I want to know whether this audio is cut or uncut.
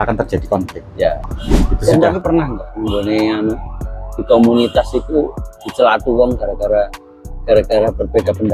cut